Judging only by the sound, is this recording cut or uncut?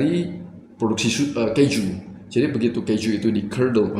uncut